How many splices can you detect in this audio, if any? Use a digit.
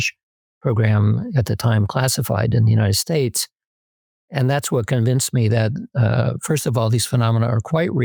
0